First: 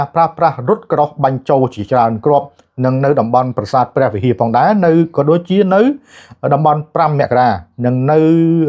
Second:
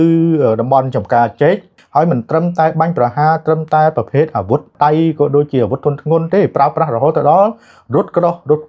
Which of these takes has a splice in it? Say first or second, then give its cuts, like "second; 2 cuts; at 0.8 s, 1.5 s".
second; 2 cuts; at 1.7 s, 4.7 s